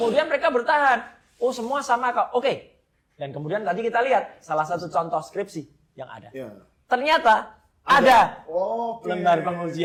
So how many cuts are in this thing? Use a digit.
0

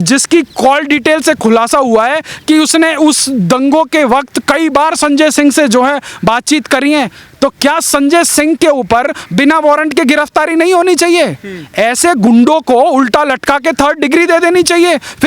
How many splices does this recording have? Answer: 0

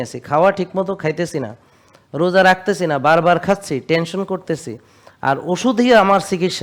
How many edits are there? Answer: 0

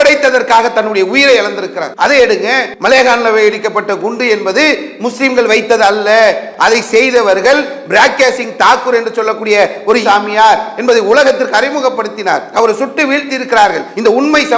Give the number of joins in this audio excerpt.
3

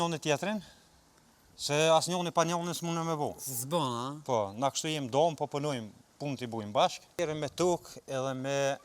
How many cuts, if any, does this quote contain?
1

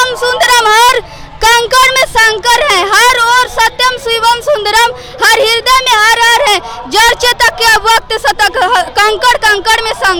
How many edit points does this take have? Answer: 0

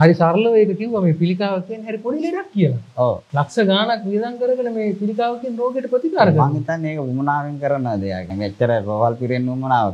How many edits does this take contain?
2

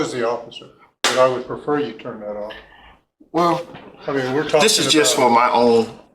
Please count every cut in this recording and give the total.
1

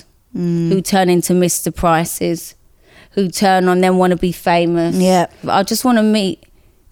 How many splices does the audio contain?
1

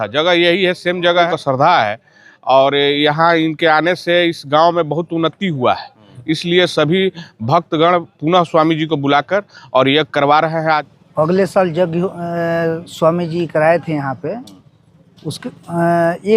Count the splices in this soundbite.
2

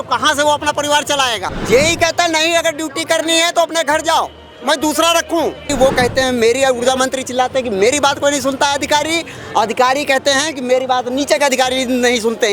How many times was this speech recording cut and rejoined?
2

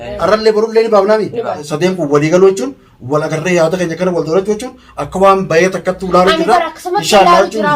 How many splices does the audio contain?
1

